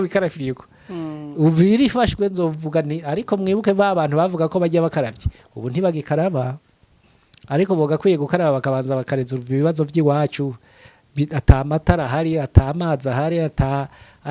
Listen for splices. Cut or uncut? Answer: uncut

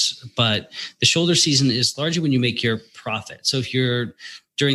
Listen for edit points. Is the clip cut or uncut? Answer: uncut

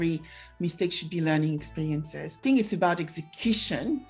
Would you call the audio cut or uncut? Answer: cut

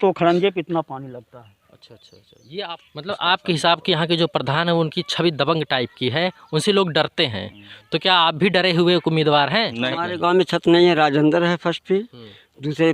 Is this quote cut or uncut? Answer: cut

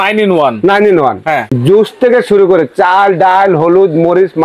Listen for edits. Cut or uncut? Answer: cut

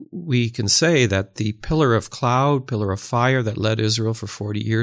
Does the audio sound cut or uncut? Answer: uncut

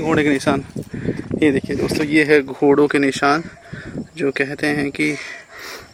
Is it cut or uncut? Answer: uncut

